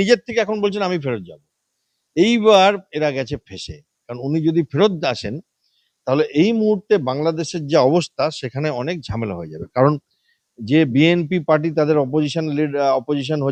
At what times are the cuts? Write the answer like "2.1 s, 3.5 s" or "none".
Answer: none